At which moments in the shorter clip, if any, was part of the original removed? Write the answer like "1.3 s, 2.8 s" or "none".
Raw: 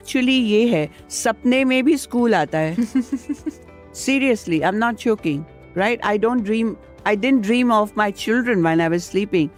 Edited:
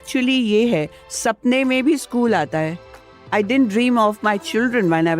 2.9 s